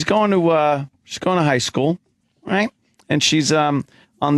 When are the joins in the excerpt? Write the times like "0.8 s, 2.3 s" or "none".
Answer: none